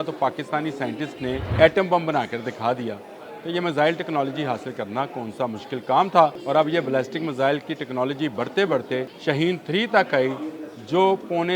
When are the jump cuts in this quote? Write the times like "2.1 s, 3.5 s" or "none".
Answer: 1.5 s, 6.4 s, 9.1 s